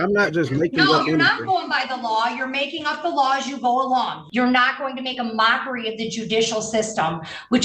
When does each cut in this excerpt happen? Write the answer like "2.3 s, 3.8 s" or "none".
4.2 s